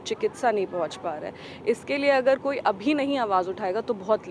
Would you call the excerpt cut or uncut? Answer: uncut